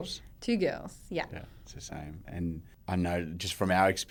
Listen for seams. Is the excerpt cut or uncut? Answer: uncut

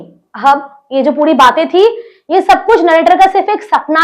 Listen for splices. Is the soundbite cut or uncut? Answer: uncut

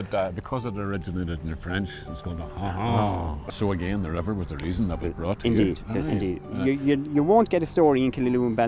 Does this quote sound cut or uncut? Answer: cut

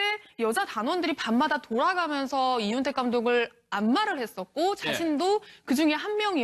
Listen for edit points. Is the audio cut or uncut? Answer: uncut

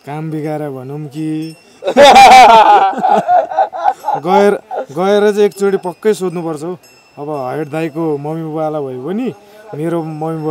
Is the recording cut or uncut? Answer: uncut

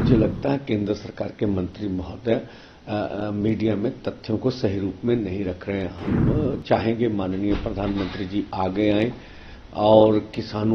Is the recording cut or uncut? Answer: uncut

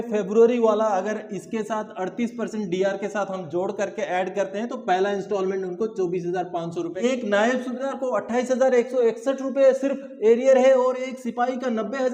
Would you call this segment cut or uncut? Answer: cut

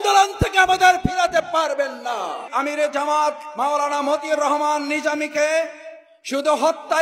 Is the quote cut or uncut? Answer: cut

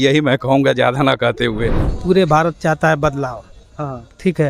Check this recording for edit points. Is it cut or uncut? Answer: cut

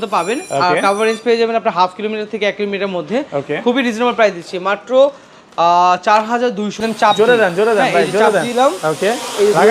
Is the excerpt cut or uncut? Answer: cut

